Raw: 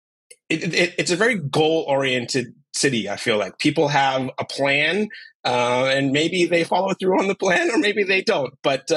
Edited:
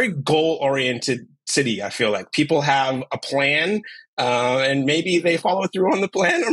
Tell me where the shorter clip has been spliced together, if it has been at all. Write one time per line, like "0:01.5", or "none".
none